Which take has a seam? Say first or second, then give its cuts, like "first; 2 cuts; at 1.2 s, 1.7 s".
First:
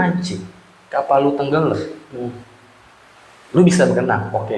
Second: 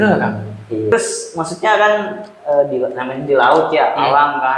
second; 1 cut; at 0.9 s